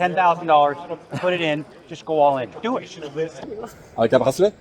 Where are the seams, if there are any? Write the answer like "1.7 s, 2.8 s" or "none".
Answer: 3.4 s